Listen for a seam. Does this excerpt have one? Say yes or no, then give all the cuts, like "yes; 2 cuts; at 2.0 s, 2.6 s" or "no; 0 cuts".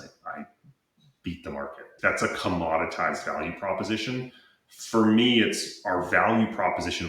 yes; 1 cut; at 1.9 s